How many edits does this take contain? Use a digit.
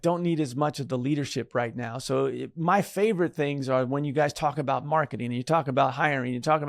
0